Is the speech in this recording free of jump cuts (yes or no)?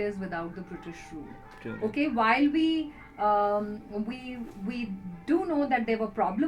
yes